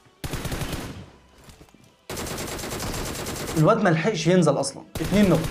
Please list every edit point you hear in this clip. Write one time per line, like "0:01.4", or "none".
0:03.5